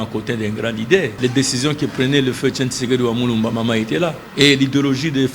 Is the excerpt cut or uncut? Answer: cut